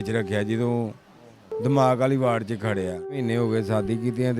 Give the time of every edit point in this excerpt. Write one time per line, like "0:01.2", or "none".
0:03.2